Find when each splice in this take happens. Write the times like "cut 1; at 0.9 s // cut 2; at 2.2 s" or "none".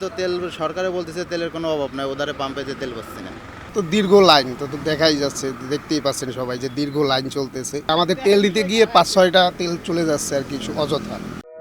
none